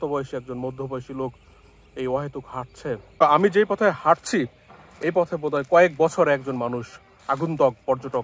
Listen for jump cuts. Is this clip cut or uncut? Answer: cut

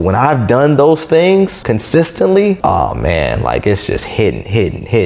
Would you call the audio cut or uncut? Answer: cut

